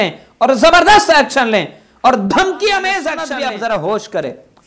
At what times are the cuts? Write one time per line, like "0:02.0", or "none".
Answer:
0:03.2